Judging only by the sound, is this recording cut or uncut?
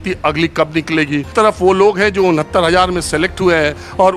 cut